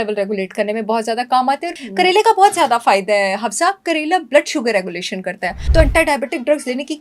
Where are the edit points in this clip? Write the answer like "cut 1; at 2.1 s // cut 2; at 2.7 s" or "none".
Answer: cut 1; at 1.9 s // cut 2; at 5.5 s

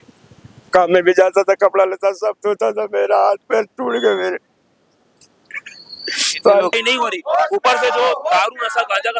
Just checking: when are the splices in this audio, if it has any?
cut 1; at 6.8 s

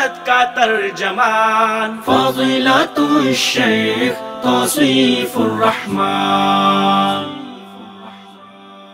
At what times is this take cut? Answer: none

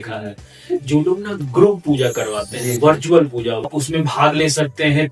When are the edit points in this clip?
cut 1; at 3.7 s

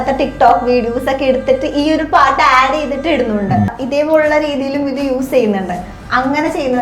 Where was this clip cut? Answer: cut 1; at 3.7 s

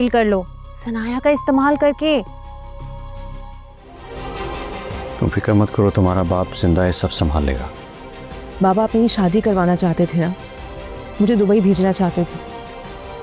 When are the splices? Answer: cut 1; at 3.9 s

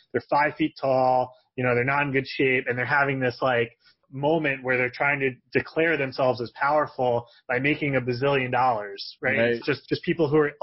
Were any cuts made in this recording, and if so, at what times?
cut 1; at 9.7 s

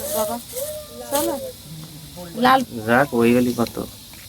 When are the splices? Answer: cut 1; at 2.7 s

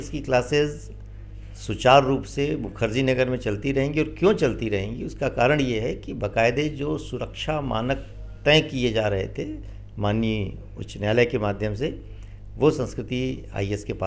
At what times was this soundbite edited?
none

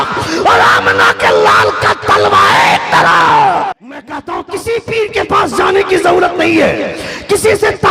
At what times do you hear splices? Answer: cut 1; at 4.1 s

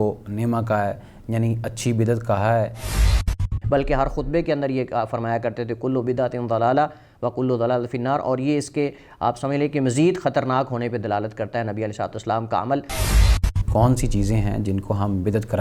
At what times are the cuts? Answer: cut 1; at 3.1 s // cut 2; at 13.4 s

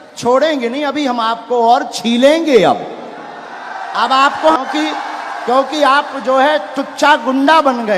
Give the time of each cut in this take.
cut 1; at 4.6 s

